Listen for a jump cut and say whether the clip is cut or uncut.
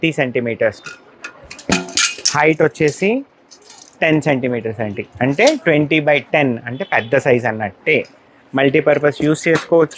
uncut